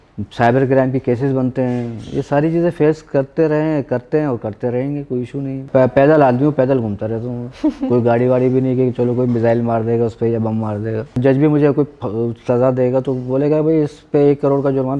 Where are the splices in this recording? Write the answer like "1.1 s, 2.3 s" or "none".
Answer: 5.7 s, 11.2 s

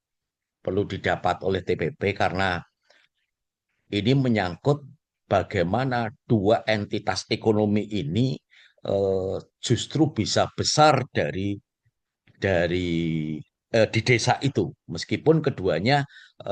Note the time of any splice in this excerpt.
none

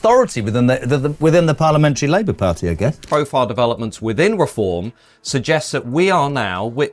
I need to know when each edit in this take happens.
3.0 s

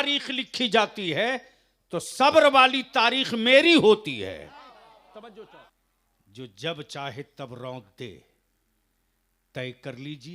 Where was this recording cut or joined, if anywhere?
5.7 s

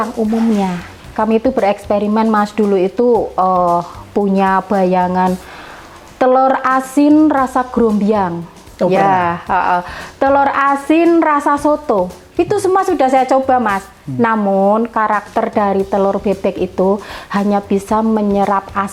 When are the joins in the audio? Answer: 1.0 s

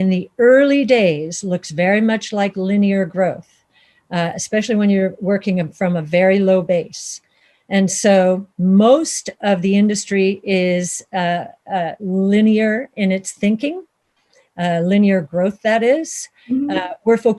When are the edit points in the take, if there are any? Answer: none

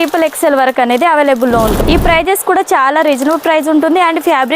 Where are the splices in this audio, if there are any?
1.8 s

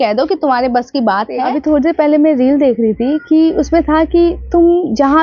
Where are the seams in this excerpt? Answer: 1.4 s

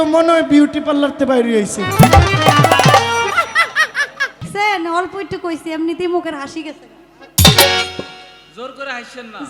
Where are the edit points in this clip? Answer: 4.5 s

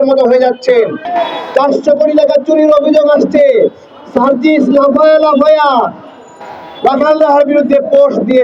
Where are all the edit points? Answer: 1.0 s

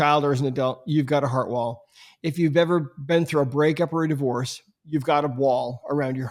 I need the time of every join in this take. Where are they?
none

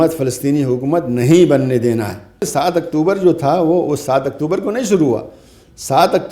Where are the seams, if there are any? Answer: 2.4 s

